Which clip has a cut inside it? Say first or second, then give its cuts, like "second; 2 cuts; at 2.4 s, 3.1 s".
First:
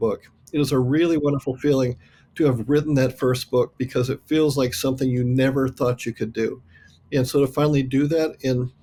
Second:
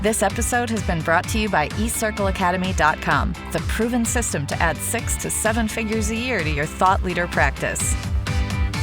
second; 1 cut; at 7.8 s